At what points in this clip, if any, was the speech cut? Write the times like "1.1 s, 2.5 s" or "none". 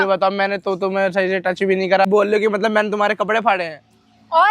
2.1 s